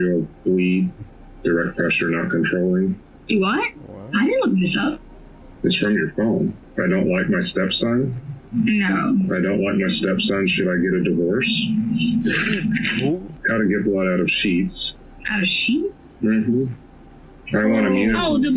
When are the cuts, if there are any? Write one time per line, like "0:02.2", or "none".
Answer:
0:06.6
0:13.3

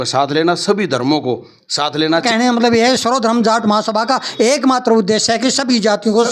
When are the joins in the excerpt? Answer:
0:02.2

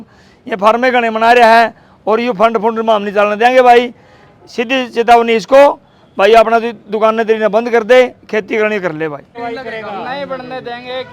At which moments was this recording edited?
0:09.3

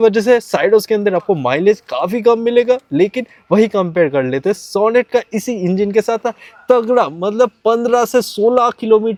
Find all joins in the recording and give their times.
none

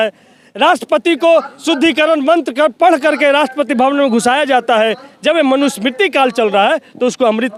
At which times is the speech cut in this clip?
none

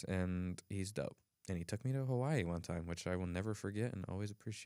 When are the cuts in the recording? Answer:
none

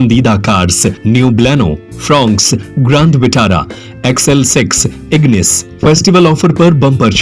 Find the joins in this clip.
0:01.0

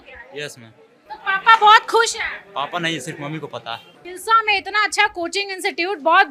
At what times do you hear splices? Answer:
0:04.0

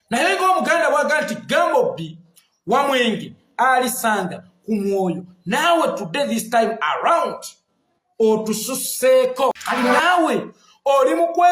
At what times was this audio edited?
0:09.5

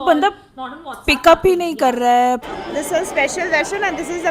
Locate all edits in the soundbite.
0:02.5

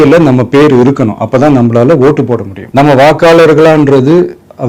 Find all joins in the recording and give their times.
0:02.6

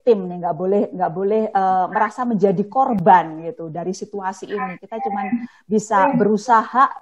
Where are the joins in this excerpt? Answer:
none

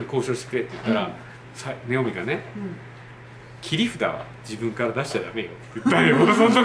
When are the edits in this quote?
none

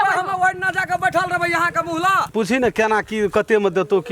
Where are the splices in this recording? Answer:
0:02.3

